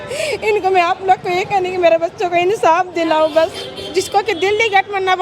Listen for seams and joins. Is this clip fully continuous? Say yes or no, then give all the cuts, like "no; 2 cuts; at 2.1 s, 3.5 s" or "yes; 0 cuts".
no; 1 cut; at 3.6 s